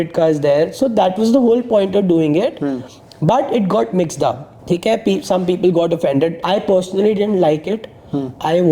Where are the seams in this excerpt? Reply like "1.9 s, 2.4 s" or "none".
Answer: 4.5 s, 6.4 s

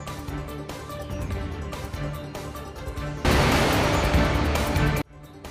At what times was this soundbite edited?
none

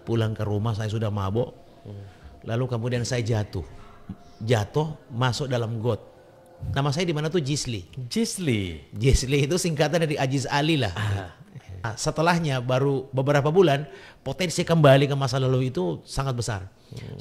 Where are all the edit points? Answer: 6.7 s, 11.9 s

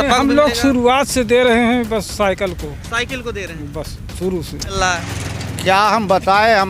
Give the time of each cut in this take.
4.7 s

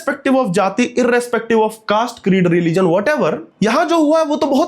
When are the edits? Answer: 3.5 s

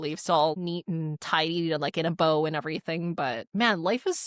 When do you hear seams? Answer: 1.2 s, 3.4 s

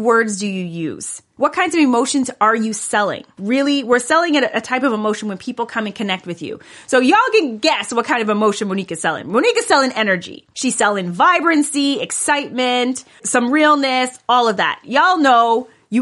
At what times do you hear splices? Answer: 3.4 s, 13.2 s

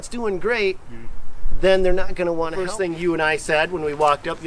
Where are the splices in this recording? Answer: 2.6 s

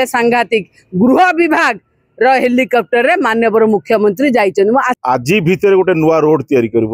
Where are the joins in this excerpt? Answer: 4.9 s

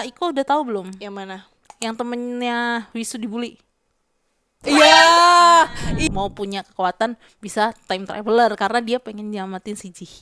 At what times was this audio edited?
5.7 s

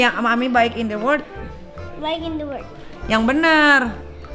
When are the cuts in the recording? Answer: none

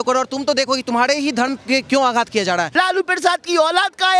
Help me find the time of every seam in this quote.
2.7 s

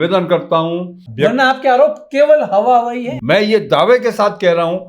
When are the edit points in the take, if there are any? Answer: 1.0 s, 3.1 s

